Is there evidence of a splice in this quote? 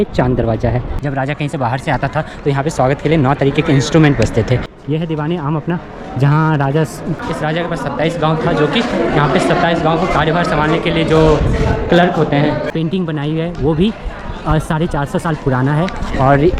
yes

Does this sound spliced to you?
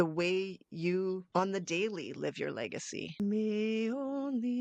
yes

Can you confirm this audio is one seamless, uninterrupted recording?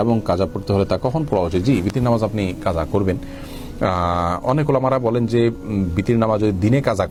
yes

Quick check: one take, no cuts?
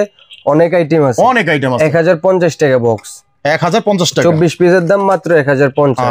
yes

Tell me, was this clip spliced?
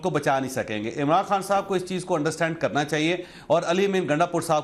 no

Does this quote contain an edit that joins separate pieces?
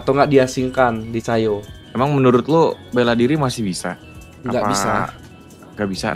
yes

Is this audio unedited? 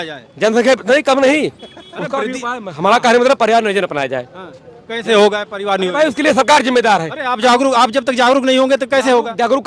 yes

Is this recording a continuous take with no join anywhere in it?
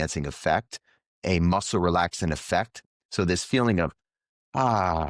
no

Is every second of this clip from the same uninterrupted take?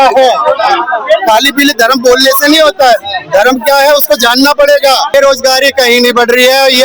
no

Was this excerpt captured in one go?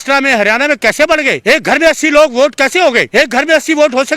no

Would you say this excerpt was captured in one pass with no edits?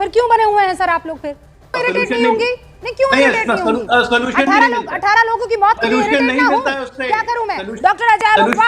no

